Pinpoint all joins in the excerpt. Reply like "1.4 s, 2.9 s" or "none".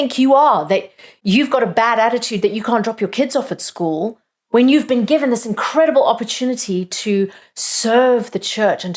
1.1 s